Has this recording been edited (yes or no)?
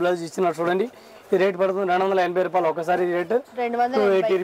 no